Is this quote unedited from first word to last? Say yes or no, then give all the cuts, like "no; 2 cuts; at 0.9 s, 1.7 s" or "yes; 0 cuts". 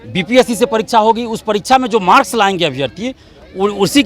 yes; 0 cuts